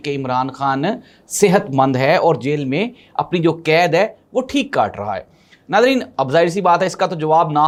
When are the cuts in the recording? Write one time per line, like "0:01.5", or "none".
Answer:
none